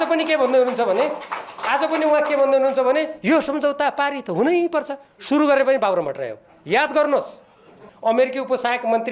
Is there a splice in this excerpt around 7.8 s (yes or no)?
yes